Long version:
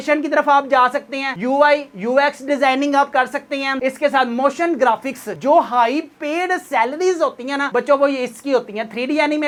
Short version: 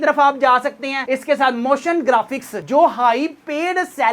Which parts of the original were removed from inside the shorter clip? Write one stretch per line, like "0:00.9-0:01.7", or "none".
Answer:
0:01.3-0:03.7